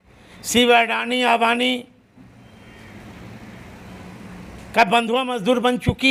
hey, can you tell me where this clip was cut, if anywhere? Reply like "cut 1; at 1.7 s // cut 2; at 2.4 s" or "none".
none